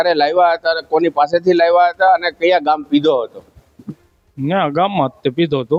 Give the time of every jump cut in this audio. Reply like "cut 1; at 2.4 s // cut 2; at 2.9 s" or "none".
none